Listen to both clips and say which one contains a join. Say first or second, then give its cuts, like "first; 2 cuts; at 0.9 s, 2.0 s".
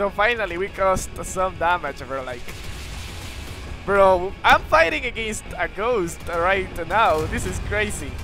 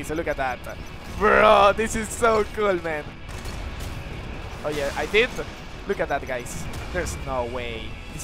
second; 1 cut; at 3.2 s